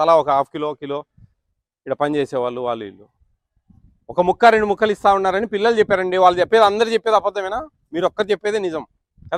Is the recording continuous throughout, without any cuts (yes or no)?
yes